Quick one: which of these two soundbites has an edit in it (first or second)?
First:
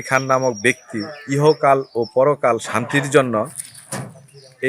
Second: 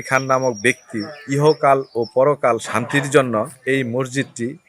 second